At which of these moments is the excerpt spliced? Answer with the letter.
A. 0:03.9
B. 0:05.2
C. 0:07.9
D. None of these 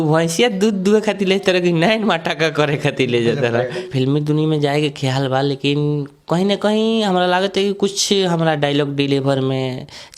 A